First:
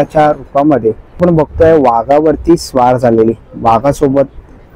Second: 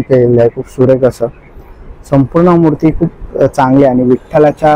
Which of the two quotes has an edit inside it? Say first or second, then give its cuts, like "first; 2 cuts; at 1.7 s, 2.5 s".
first; 1 cut; at 1.2 s